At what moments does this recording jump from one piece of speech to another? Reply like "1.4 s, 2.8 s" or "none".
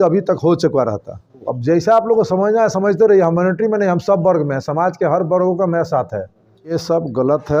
1.5 s, 6.7 s